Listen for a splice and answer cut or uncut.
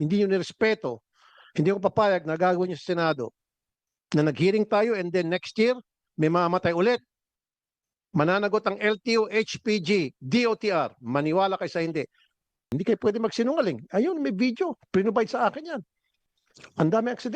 cut